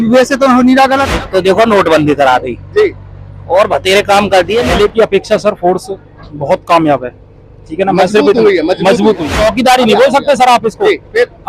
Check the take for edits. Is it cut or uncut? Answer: cut